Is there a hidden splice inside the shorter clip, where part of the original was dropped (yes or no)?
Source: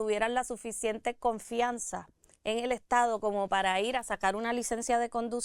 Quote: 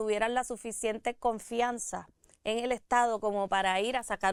no